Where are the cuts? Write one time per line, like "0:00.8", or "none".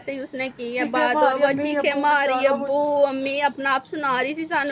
none